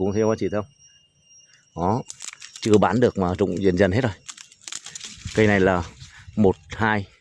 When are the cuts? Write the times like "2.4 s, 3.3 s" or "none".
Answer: none